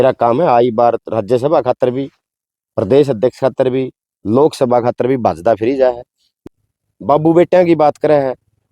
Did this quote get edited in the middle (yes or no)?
yes